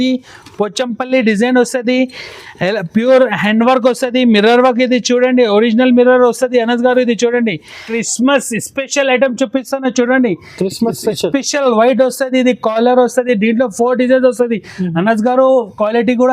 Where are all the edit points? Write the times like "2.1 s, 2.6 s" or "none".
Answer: 8.0 s